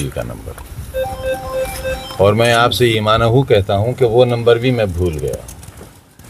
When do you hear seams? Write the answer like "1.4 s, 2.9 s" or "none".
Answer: none